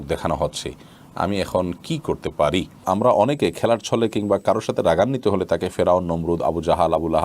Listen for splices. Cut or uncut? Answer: cut